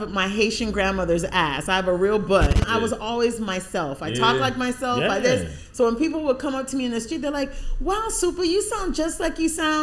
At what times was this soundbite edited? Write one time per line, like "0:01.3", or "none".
0:02.6